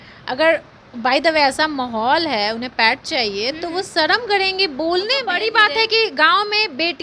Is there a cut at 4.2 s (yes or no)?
no